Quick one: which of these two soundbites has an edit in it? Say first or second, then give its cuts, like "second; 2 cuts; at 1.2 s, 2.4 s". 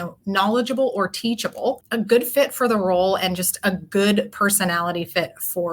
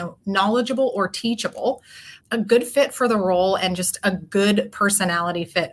first; 1 cut; at 1.8 s